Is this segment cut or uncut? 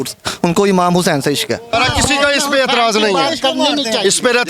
cut